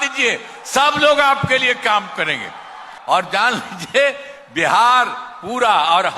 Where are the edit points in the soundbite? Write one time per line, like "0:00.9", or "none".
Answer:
0:02.9